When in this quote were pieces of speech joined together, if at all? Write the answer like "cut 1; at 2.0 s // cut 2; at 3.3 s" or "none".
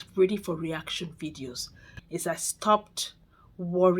cut 1; at 1.7 s